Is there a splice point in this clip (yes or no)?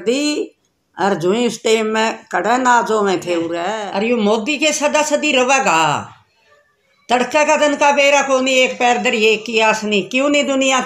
yes